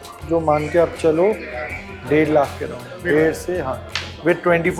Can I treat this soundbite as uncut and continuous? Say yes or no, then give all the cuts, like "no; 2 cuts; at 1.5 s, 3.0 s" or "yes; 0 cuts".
yes; 0 cuts